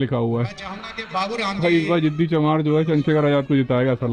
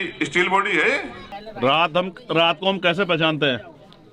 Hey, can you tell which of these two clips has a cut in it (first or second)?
second